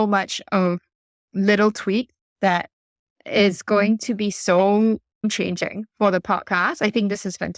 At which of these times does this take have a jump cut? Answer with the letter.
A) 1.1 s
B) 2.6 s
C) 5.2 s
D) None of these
C